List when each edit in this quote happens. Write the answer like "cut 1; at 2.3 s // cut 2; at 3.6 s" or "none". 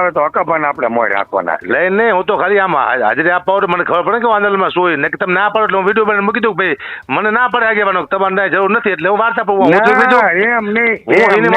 none

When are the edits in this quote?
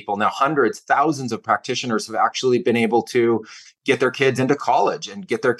none

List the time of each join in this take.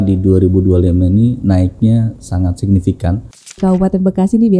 cut 1; at 3.6 s

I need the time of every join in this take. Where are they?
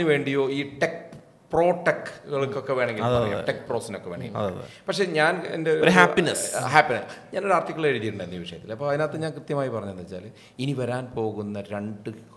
none

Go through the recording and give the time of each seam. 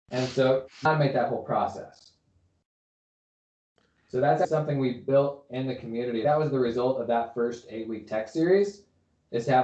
none

